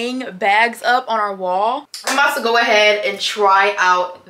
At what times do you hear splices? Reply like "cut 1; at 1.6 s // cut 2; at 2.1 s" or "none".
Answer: cut 1; at 1.8 s

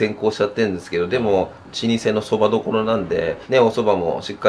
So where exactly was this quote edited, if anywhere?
cut 1; at 1.6 s // cut 2; at 3.4 s

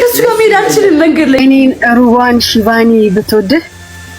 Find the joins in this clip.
cut 1; at 1.4 s

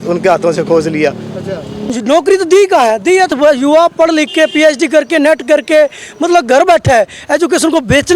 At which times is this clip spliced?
cut 1; at 2.0 s // cut 2; at 3.3 s // cut 3; at 7.2 s

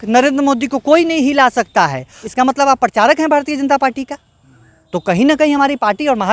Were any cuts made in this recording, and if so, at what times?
cut 1; at 2.2 s

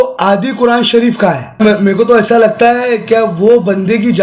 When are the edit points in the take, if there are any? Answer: cut 1; at 1.6 s

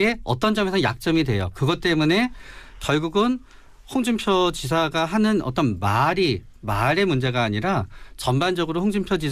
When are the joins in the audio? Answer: cut 1; at 4.1 s

